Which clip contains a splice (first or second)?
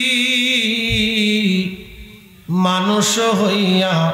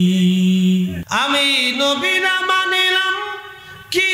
second